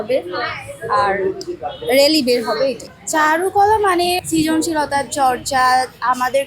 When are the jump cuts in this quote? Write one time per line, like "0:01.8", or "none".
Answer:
0:02.8
0:04.2